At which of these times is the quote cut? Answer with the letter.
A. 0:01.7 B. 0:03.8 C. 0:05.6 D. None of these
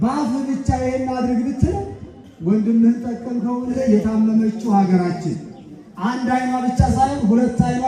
B